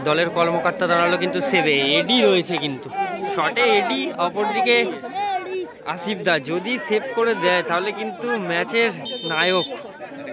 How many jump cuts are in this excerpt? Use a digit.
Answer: 0